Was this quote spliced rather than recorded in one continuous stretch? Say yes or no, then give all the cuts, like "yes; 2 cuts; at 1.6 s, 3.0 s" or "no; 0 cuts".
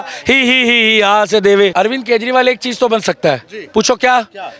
yes; 1 cut; at 1.7 s